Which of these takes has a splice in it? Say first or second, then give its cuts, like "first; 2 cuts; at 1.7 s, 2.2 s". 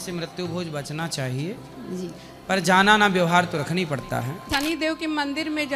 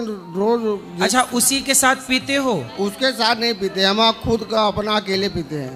first; 1 cut; at 4.4 s